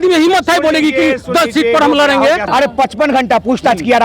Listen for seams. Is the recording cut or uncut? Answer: cut